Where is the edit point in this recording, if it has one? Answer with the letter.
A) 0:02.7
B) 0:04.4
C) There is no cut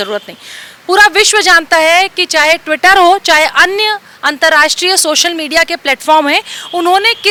C